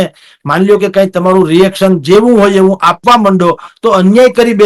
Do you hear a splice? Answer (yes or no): no